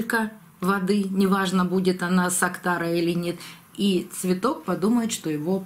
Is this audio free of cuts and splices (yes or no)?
yes